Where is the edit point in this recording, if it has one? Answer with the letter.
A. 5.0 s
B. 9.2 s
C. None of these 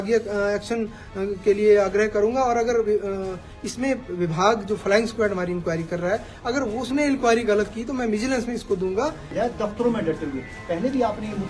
B